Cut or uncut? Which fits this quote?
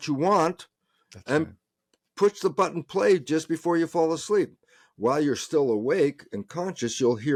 uncut